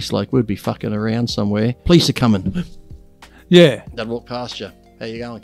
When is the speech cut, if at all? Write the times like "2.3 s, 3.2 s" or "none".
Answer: 1.8 s